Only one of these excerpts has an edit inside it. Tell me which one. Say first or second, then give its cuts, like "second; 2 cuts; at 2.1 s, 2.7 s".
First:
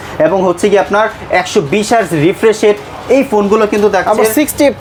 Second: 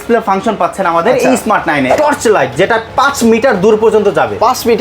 second; 1 cut; at 1.9 s